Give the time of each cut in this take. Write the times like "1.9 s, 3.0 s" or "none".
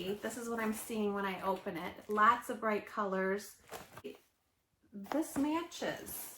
4.1 s